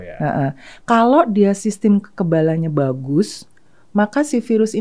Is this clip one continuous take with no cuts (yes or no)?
yes